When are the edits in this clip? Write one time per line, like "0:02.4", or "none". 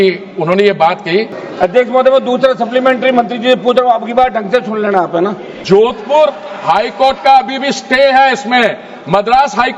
0:01.4
0:05.5